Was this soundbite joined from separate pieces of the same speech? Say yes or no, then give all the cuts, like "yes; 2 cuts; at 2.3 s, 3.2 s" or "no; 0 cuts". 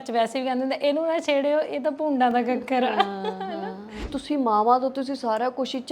yes; 1 cut; at 4.1 s